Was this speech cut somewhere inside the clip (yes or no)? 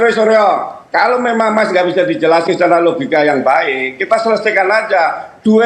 no